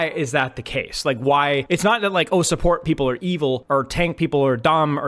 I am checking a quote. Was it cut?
yes; 2 cuts; at 1.6 s, 3.6 s

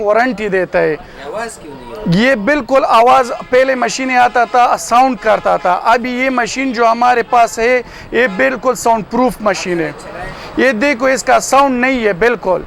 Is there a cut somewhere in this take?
no; 0 cuts

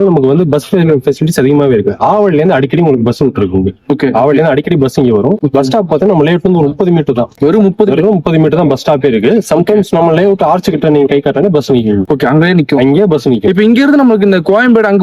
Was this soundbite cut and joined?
no; 0 cuts

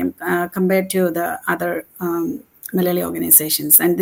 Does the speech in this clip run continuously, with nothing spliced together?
yes; 0 cuts

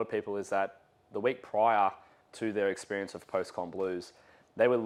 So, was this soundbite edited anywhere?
no; 0 cuts

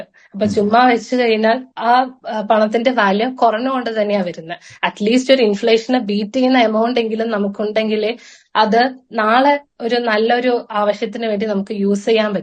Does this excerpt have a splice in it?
no; 0 cuts

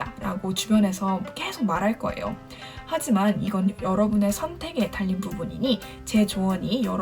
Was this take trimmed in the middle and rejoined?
no; 0 cuts

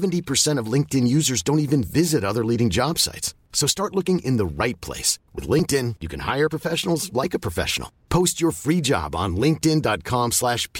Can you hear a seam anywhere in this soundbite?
no; 0 cuts

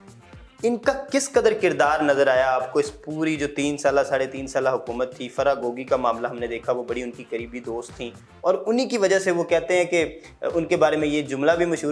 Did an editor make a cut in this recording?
no; 0 cuts

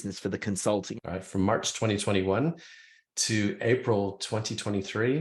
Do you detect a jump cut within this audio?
yes; 1 cut; at 0.9 s

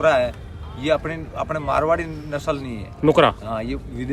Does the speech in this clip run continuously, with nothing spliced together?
yes; 0 cuts

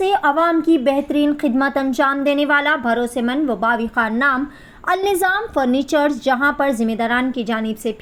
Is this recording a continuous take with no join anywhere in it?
yes; 0 cuts

